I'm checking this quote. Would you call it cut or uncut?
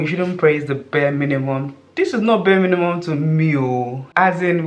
uncut